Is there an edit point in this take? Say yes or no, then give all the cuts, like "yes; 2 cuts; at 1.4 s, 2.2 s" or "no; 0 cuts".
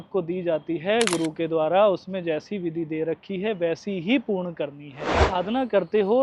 yes; 1 cut; at 5.2 s